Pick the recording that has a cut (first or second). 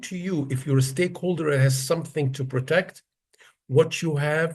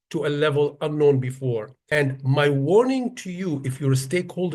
second